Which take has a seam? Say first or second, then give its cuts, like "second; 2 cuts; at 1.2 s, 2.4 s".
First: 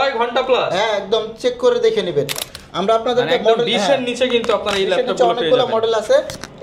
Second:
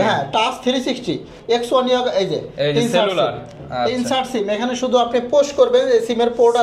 first; 1 cut; at 2.3 s